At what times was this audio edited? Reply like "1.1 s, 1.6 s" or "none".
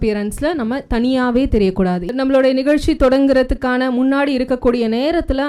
2.1 s